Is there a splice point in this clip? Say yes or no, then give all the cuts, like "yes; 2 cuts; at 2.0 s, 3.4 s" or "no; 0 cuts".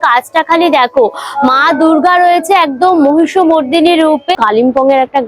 yes; 1 cut; at 4.3 s